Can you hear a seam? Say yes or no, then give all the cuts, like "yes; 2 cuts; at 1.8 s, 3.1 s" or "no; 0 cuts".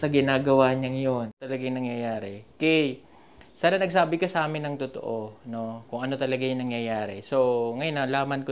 yes; 1 cut; at 1.5 s